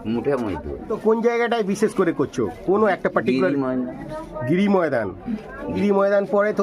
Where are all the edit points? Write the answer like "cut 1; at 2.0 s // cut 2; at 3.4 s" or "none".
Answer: cut 1; at 0.9 s // cut 2; at 5.8 s